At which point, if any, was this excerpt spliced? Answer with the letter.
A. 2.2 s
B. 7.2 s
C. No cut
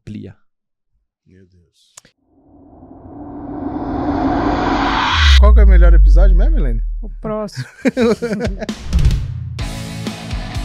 A